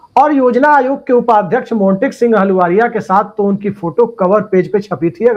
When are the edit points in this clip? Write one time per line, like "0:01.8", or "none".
none